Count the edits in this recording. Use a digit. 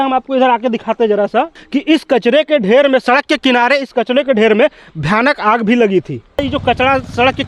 2